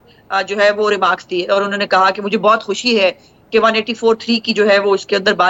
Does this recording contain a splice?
no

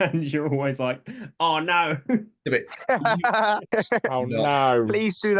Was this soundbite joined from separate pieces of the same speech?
yes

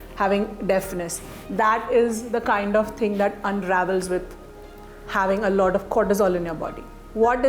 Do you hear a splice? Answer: no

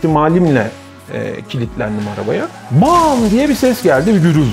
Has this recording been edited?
no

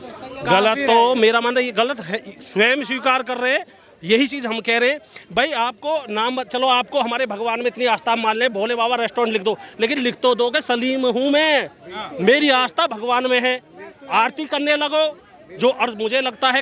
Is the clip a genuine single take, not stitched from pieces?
yes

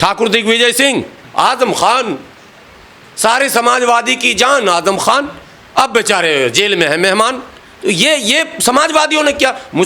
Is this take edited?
yes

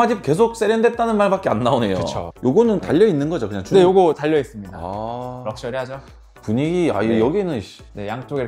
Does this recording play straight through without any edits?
no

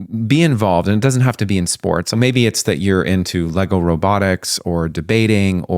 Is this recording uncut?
no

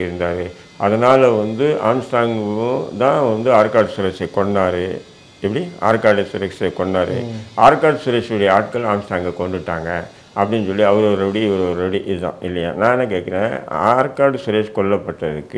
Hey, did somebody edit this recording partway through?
no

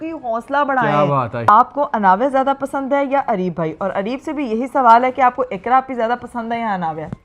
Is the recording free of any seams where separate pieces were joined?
no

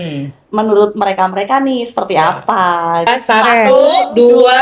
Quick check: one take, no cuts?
no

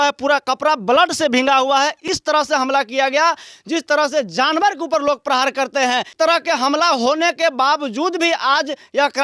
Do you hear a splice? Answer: no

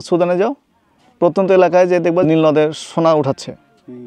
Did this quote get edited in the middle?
yes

